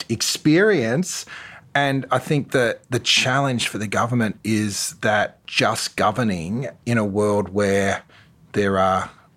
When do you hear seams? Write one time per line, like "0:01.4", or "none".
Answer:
0:08.4